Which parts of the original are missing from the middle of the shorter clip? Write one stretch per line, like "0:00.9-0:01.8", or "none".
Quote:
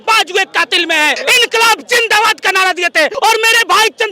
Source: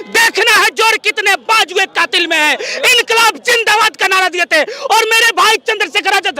0:02.6-0:02.7
0:04.7-0:04.8